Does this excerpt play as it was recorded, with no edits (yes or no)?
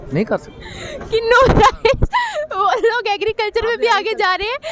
yes